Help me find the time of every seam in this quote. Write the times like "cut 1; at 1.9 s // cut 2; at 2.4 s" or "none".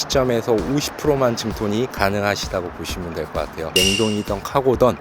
cut 1; at 3.9 s

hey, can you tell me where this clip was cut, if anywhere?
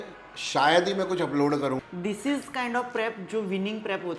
cut 1; at 1.8 s

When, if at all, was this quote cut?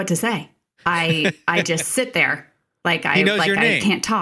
none

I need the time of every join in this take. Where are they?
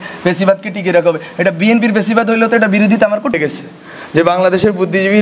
cut 1; at 3.4 s

